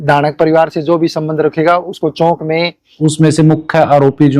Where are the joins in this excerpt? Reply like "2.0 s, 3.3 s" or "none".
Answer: 2.9 s